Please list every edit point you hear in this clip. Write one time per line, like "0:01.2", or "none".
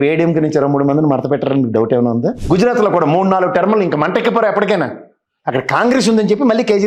0:02.4

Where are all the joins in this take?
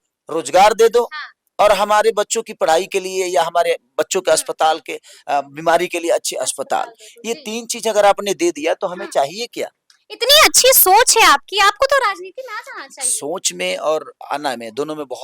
none

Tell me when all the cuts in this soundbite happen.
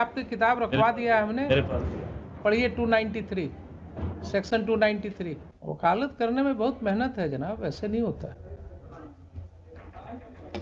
none

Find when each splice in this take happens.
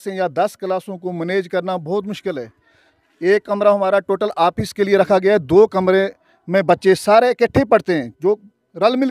none

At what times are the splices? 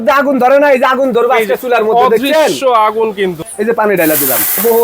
0:03.4

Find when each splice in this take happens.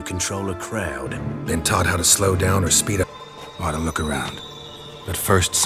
0:03.1

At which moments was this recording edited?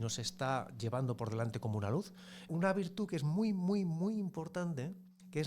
0:02.5

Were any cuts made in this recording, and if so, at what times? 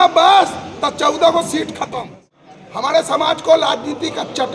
0:02.2

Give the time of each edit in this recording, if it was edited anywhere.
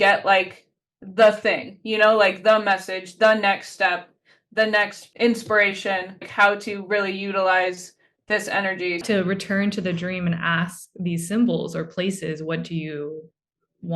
0:05.0
0:06.3
0:09.0

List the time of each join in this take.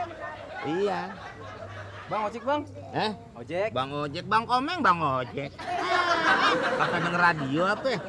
none

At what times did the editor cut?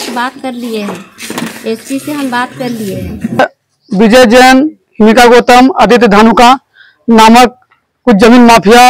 0:03.4

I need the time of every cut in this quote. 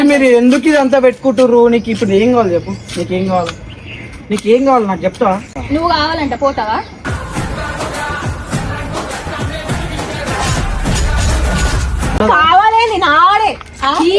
none

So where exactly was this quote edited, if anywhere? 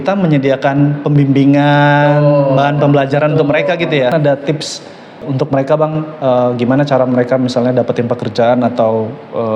0:04.1
0:05.2

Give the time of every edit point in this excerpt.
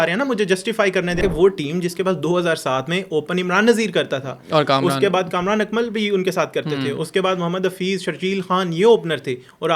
0:01.2

